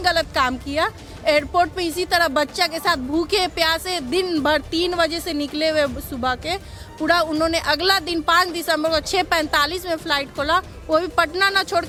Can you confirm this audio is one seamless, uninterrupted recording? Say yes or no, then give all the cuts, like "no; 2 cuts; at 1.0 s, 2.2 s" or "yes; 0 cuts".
yes; 0 cuts